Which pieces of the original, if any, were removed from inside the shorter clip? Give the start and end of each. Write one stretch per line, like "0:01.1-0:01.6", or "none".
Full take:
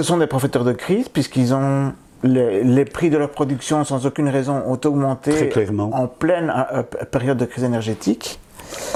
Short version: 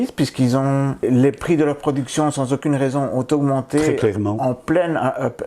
0:02.0-0:02.6